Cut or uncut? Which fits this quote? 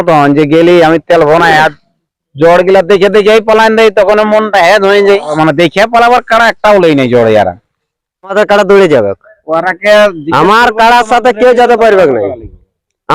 cut